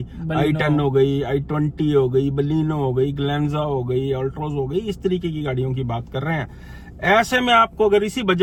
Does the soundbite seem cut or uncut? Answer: uncut